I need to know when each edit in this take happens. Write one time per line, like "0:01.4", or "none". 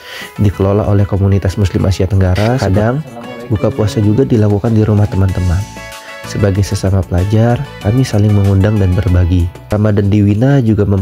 0:02.6
0:09.6